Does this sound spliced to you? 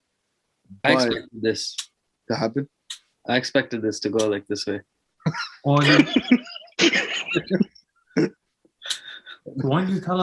no; 0 cuts

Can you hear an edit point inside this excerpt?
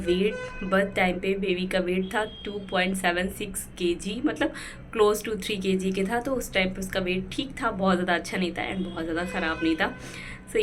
no; 0 cuts

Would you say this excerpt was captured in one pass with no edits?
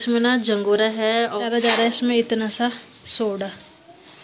no; 1 cut; at 1.3 s

